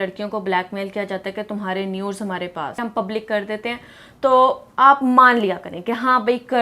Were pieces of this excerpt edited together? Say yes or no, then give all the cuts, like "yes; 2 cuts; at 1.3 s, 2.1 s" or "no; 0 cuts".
yes; 1 cut; at 2.8 s